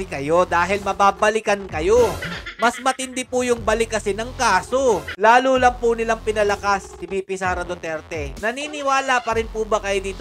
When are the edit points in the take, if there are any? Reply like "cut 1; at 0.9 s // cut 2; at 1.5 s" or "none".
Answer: cut 1; at 5.1 s // cut 2; at 8.4 s